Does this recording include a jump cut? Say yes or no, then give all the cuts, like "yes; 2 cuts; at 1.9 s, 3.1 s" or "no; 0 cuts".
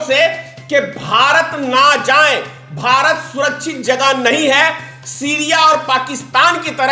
no; 0 cuts